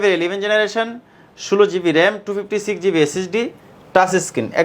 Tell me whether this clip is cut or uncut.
uncut